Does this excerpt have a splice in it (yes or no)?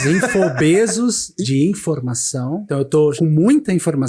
yes